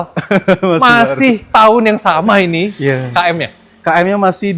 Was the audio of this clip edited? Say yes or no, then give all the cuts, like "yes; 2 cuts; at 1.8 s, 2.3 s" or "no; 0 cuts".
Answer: no; 0 cuts